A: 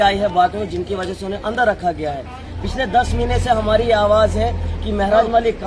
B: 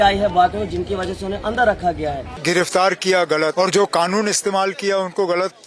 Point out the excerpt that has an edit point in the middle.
B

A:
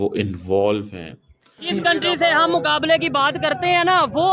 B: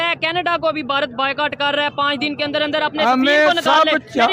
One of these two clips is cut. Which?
A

